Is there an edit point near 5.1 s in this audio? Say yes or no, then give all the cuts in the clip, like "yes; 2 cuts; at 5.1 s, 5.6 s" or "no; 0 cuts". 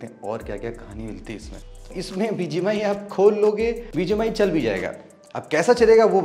no; 2 cuts; at 2.0 s, 3.8 s